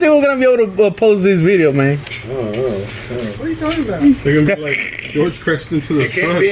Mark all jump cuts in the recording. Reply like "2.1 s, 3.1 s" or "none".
none